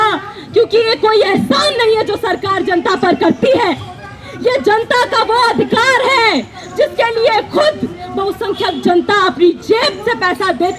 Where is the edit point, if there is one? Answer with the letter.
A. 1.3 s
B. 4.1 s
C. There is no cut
C